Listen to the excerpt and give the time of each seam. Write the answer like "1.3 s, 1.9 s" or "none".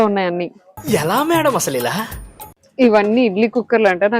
2.6 s